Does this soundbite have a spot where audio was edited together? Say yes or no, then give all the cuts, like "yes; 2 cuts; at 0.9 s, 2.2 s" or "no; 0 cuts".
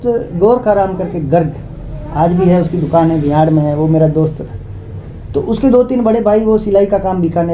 no; 0 cuts